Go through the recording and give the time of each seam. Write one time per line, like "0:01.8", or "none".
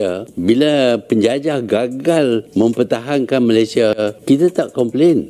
none